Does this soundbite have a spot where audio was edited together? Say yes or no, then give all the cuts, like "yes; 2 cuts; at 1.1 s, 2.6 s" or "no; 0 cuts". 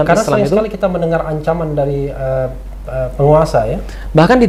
no; 0 cuts